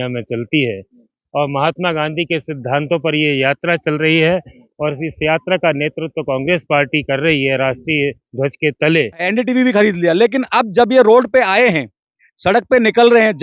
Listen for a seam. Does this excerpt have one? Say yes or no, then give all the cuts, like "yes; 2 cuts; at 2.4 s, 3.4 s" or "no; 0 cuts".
yes; 1 cut; at 9.3 s